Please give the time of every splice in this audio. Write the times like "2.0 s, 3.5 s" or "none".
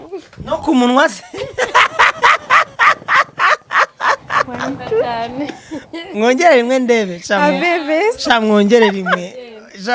none